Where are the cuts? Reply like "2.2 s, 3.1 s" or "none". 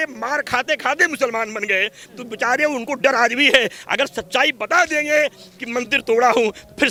none